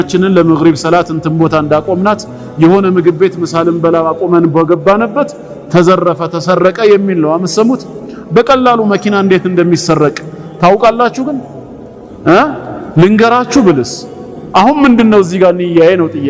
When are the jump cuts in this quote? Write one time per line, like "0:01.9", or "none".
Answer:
none